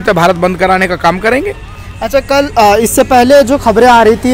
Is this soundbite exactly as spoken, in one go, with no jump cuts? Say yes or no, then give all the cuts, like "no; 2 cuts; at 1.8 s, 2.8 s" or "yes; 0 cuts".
yes; 0 cuts